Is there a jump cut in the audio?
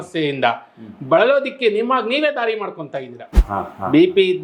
yes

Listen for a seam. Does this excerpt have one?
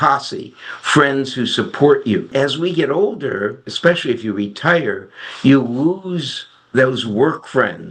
yes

